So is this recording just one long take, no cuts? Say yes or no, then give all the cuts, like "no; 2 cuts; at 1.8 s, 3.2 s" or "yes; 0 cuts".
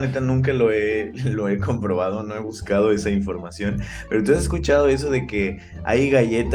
yes; 0 cuts